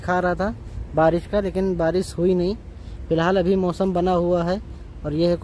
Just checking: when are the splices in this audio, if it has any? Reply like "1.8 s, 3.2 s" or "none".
none